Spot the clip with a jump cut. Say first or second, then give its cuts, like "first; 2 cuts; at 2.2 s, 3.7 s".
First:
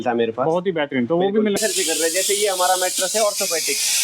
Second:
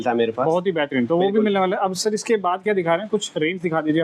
first; 1 cut; at 1.6 s